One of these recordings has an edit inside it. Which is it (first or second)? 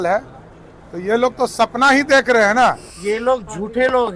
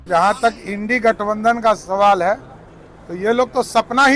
first